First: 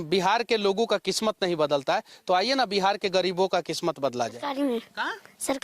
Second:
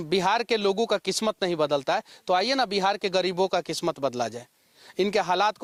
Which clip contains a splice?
first; 1 cut; at 4.4 s

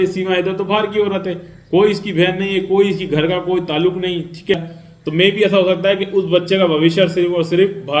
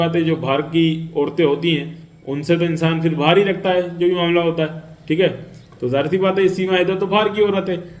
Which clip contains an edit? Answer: first; 1 cut; at 4.5 s

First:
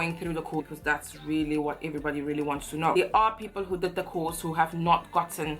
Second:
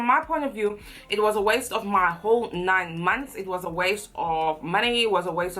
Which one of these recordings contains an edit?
first; 1 cut; at 2.9 s

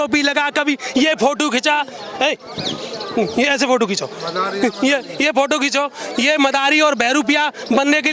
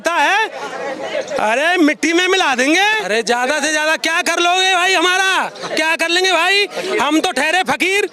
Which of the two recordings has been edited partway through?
second; 1 cut; at 3.0 s

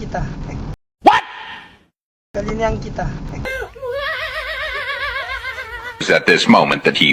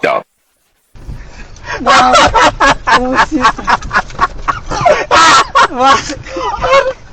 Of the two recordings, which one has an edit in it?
first; 1 cut; at 6.0 s

